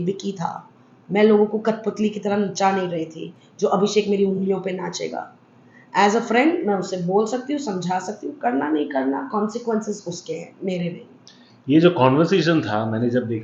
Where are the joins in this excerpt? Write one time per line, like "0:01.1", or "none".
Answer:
none